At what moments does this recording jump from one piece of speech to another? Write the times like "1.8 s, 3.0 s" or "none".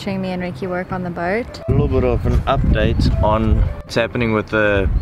1.6 s, 3.9 s